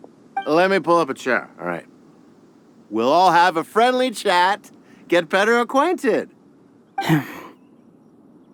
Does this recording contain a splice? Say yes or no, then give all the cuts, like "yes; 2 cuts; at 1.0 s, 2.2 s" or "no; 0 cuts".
no; 0 cuts